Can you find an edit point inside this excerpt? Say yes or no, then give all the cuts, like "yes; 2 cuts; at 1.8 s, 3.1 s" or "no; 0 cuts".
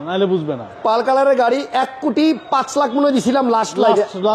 no; 0 cuts